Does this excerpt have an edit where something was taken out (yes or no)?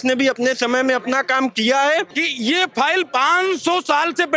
yes